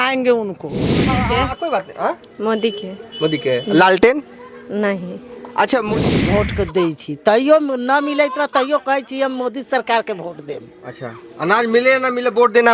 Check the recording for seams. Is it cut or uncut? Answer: cut